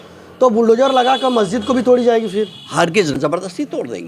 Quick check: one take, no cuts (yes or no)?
no